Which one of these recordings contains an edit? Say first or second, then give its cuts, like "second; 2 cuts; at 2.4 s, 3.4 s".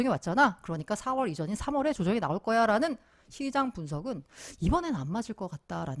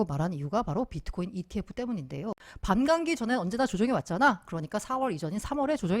second; 1 cut; at 2.5 s